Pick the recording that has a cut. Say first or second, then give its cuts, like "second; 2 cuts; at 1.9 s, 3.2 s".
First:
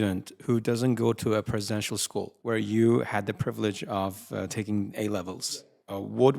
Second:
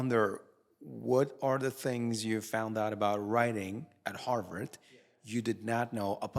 first; 2 cuts; at 2.3 s, 5.4 s